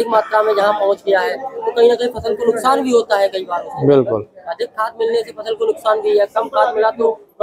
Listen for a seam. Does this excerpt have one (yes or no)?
no